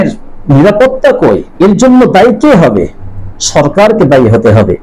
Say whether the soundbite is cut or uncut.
cut